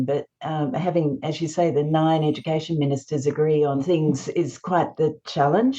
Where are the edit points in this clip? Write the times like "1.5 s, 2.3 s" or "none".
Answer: 3.8 s

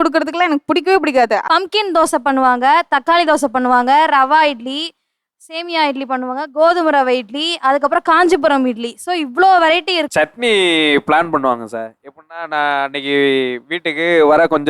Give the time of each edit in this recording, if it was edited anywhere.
1.4 s, 10.1 s

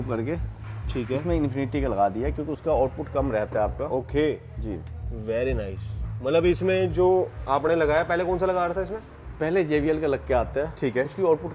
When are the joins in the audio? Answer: none

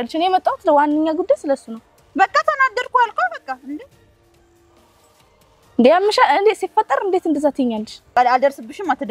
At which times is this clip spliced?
8.1 s

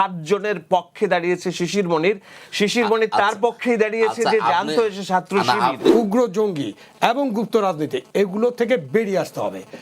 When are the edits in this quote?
5.8 s

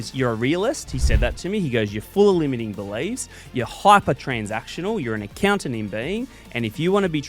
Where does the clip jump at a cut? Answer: none

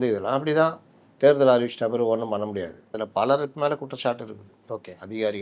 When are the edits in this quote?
2.9 s

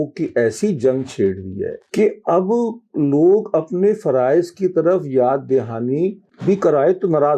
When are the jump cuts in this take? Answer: 1.8 s, 6.3 s

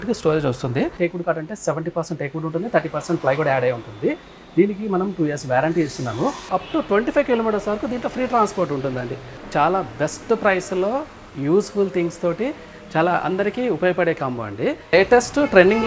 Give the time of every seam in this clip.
0.9 s, 6.5 s, 9.3 s, 14.9 s

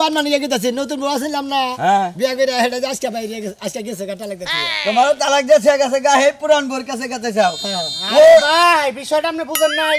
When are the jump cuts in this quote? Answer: none

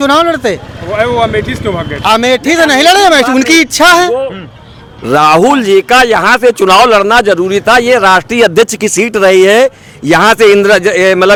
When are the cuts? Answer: none

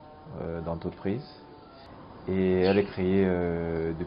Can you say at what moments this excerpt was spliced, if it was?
1.8 s

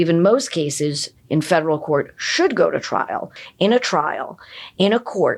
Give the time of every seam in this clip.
3.4 s

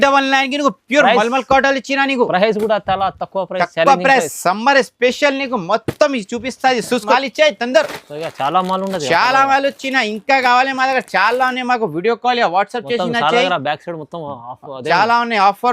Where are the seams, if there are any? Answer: 7.1 s

